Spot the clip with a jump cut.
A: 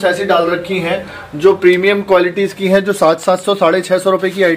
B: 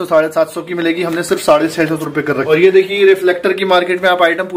B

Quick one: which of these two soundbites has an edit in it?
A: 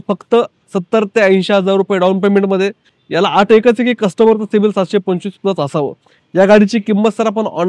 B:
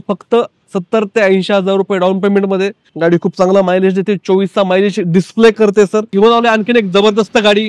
B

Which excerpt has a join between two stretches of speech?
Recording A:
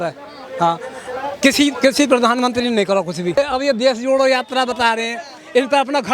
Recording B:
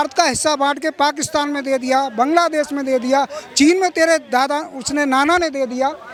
A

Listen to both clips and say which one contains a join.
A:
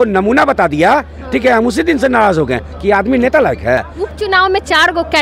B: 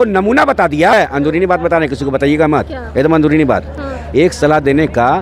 B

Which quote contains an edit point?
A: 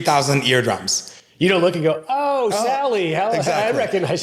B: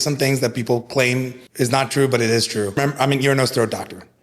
B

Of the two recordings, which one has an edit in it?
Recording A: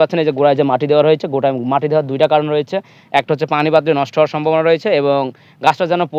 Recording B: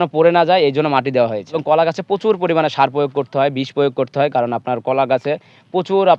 B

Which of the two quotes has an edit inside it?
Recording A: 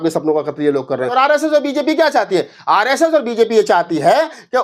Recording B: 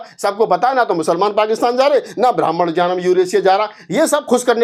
A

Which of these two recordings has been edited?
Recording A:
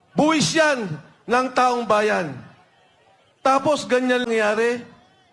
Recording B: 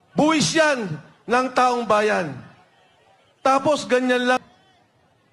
B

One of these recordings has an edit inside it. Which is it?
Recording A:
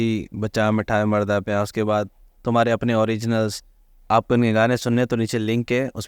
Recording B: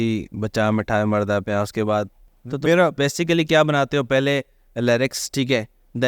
B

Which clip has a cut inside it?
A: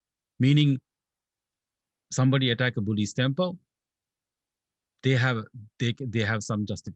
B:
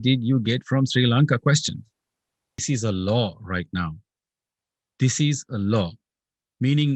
B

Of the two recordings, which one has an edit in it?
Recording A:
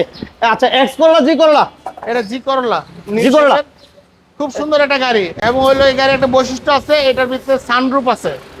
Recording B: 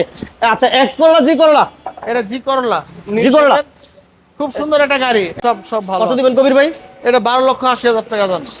B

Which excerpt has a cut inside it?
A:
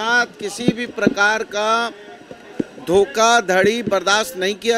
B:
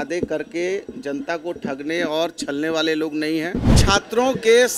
B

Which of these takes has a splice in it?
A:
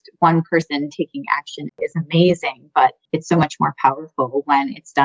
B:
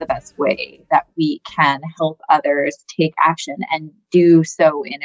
A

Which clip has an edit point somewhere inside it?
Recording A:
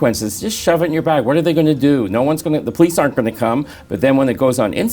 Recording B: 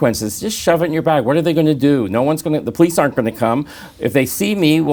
A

